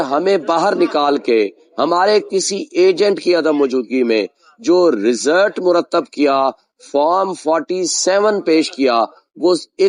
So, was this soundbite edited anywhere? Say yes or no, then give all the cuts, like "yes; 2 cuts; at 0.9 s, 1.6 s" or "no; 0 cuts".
no; 0 cuts